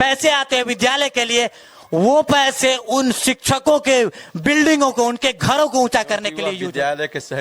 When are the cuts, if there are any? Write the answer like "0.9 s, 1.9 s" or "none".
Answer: 6.4 s

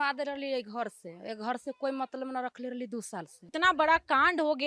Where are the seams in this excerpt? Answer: 3.5 s

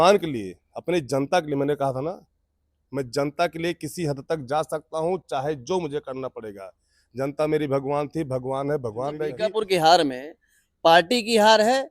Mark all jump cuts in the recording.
9.3 s

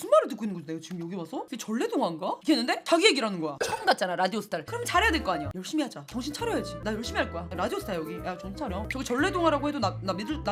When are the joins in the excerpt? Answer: none

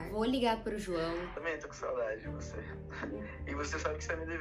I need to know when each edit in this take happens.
1.4 s

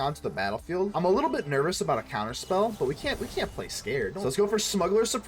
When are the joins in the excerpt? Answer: 0.9 s, 4.2 s

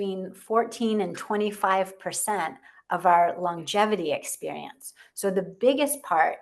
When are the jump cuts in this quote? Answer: none

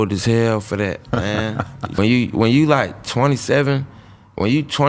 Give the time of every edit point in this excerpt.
2.0 s

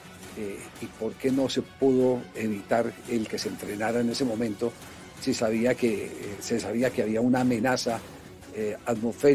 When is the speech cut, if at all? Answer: none

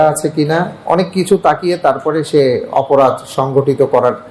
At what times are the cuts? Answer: none

